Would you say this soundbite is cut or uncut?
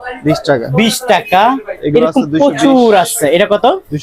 uncut